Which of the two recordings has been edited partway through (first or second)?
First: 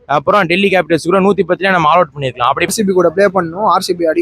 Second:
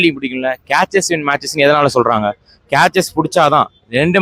first